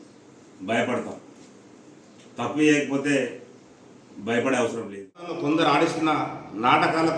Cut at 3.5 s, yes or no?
no